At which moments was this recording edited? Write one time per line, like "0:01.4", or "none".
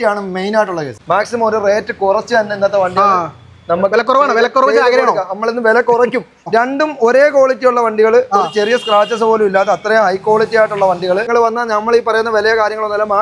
0:00.9
0:06.5
0:11.3